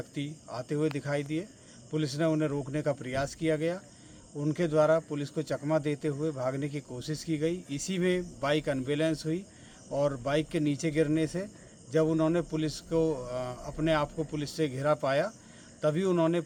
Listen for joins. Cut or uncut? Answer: uncut